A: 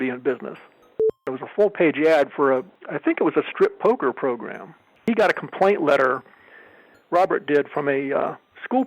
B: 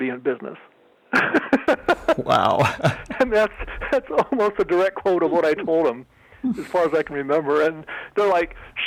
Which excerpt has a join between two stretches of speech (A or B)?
A